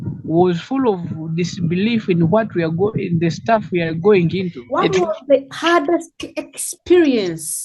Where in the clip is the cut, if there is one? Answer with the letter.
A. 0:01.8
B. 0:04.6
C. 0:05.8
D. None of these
B